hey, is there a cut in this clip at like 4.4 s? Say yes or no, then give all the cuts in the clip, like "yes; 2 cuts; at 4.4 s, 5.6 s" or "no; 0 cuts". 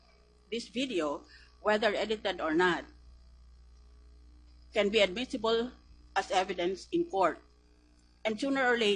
yes; 1 cut; at 4.4 s